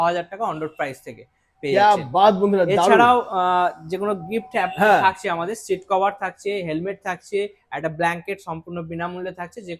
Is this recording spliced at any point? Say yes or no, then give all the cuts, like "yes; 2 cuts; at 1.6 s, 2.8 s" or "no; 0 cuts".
no; 0 cuts